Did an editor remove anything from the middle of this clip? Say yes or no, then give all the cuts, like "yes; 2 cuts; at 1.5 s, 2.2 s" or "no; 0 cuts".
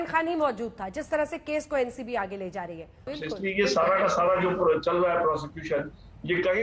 yes; 1 cut; at 3.1 s